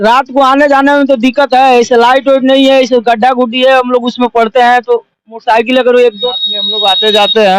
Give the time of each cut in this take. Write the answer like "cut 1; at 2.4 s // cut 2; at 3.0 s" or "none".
cut 1; at 6.2 s